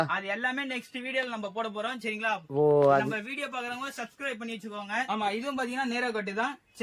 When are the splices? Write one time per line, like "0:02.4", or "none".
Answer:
0:05.0